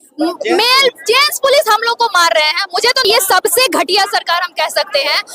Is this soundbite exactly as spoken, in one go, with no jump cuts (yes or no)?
no